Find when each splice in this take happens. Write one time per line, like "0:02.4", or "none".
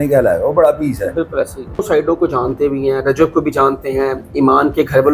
0:01.8